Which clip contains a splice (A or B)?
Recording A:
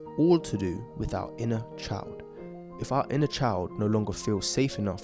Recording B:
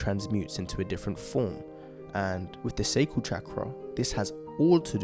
B